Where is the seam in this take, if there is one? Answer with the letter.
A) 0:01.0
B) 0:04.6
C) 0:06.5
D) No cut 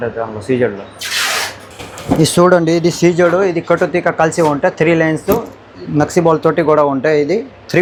D